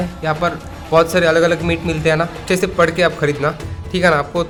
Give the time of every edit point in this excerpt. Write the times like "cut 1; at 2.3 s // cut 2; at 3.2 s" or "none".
none